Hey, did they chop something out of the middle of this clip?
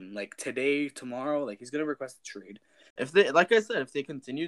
yes; 1 cut; at 2.8 s

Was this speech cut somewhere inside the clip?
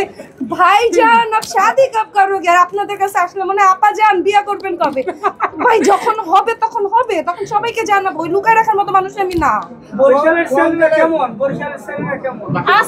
no; 0 cuts

